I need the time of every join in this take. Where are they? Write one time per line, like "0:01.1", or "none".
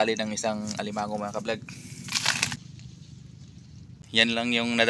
0:02.6